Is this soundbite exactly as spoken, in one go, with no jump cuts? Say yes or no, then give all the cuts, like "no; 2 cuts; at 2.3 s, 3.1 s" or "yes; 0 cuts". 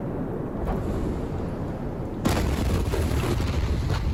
yes; 0 cuts